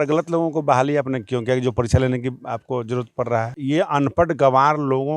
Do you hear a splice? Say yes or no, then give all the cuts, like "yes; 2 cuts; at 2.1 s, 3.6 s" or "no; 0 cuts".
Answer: yes; 1 cut; at 3.5 s